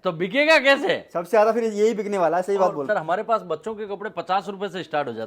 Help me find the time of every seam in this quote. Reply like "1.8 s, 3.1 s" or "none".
2.9 s

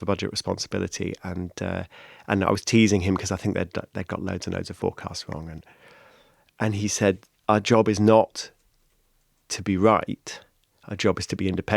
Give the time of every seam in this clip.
7.3 s

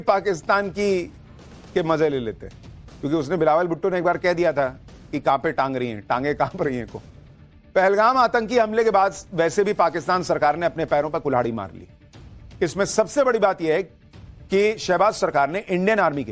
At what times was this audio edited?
5.7 s

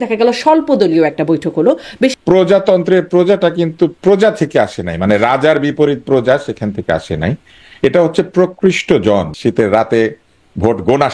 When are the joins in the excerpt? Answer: 2.1 s, 9.3 s

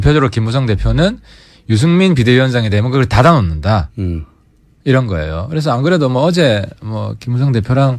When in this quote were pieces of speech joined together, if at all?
6.1 s

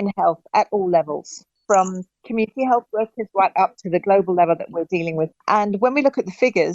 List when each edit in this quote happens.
none

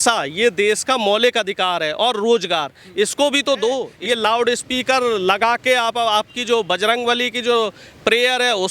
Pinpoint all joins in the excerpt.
3.9 s

